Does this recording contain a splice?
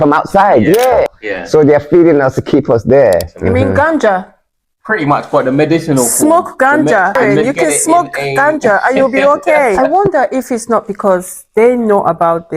yes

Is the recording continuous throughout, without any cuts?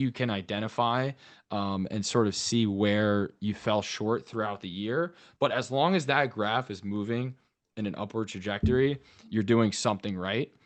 yes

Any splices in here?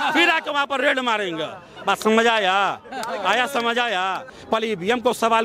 yes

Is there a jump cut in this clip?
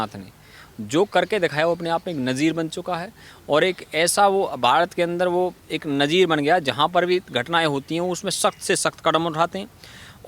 no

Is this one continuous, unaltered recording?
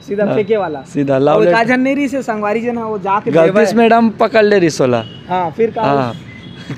yes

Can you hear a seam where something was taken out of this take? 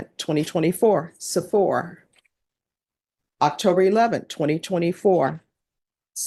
no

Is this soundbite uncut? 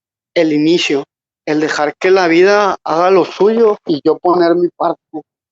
no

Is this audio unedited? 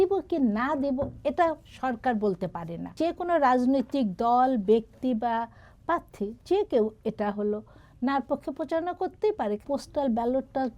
no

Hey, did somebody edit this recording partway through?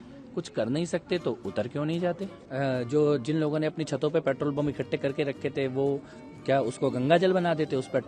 yes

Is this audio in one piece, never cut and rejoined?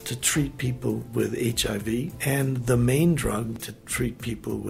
no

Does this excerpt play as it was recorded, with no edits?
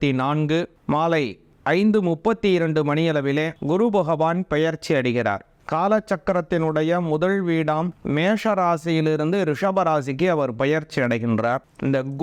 yes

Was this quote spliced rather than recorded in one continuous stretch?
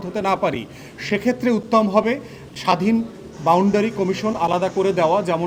no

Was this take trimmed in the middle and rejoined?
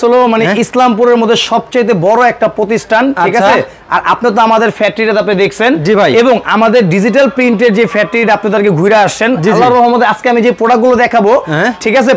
no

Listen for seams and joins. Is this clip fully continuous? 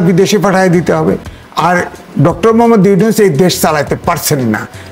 no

